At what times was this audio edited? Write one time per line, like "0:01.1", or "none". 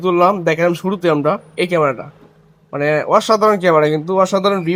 none